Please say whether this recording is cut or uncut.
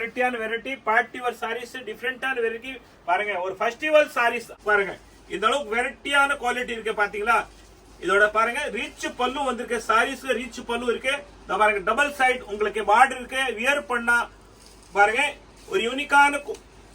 cut